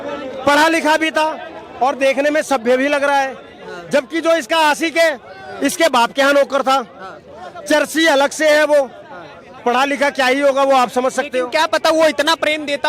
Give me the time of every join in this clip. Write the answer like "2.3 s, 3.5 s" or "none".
none